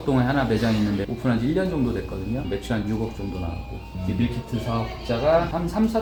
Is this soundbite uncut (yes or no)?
yes